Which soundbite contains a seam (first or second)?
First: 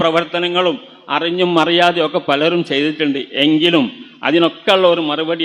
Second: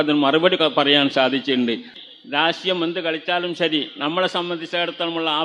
second